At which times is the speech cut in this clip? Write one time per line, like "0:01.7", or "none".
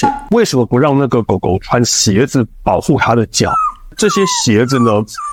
none